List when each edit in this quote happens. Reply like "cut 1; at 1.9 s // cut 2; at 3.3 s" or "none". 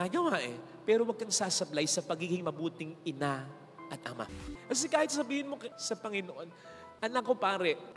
cut 1; at 4.4 s // cut 2; at 5.8 s